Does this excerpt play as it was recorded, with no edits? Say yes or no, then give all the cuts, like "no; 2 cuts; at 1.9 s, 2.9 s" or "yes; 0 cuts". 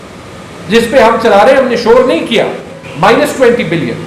no; 1 cut; at 2.8 s